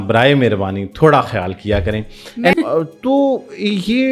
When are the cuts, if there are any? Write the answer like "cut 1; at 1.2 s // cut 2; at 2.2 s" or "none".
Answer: cut 1; at 2.5 s

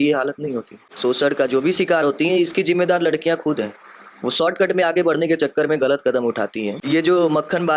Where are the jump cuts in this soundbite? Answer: cut 1; at 1.0 s // cut 2; at 6.8 s

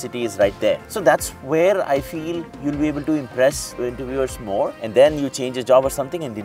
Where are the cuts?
cut 1; at 0.9 s // cut 2; at 3.7 s // cut 3; at 4.8 s

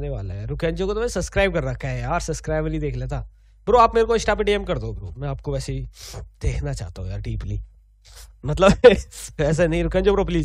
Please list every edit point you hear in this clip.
cut 1; at 8.2 s

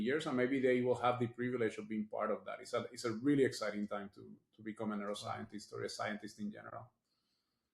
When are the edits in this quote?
none

